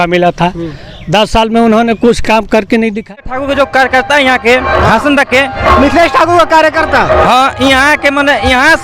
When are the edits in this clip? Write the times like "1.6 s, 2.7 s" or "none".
3.3 s